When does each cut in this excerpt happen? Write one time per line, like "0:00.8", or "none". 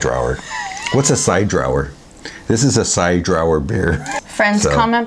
0:04.1